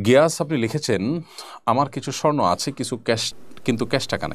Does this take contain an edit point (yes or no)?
no